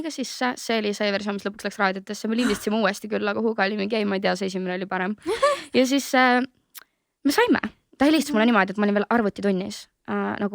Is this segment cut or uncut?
uncut